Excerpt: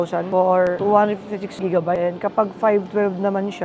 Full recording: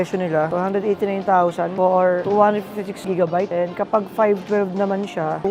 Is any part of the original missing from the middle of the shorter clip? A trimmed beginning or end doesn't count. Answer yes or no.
yes